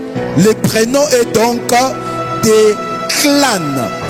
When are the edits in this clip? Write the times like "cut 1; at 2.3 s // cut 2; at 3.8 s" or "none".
none